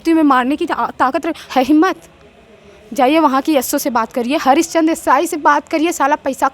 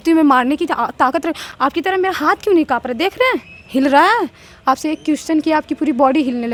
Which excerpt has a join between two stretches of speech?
first; 1 cut; at 1.4 s

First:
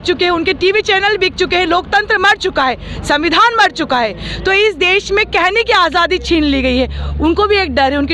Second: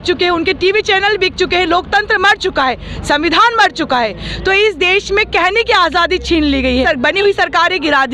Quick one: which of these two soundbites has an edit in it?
second; 1 cut; at 6.9 s

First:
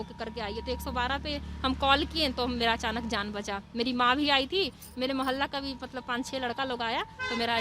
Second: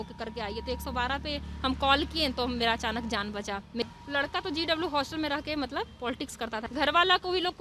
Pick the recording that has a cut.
second; 2 cuts; at 3.8 s, 6.6 s

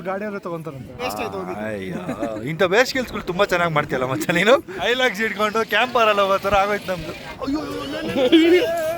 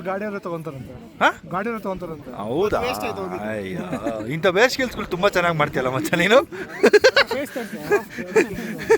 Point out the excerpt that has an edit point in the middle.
first; 3 cuts; at 1.0 s, 4.7 s, 7.3 s

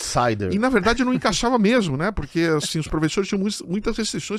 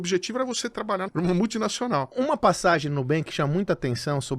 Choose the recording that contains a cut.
second; 2 cuts; at 1.1 s, 2.1 s

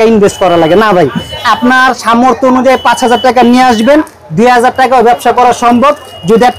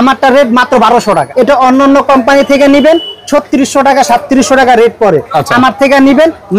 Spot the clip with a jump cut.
second; 1 cut; at 1.3 s

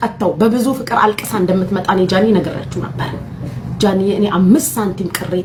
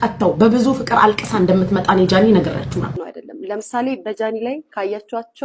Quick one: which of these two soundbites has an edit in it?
second; 1 cut; at 3.0 s

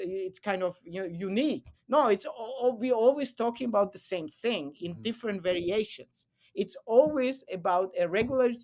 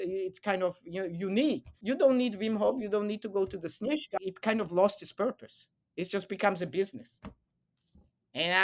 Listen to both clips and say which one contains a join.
second; 2 cuts; at 1.7 s, 4.1 s

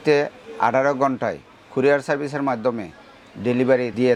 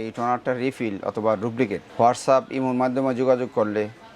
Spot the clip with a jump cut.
second; 1 cut; at 1.8 s

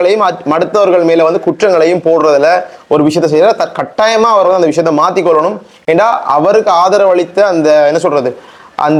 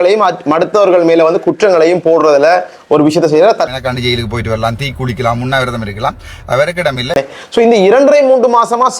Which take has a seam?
second; 2 cuts; at 3.8 s, 7.1 s

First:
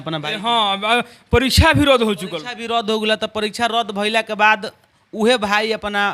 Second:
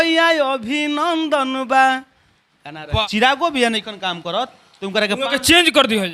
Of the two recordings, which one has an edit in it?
second; 1 cut; at 3.0 s

